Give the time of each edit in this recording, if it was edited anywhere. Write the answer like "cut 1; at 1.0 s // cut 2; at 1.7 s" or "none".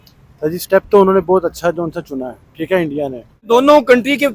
cut 1; at 3.4 s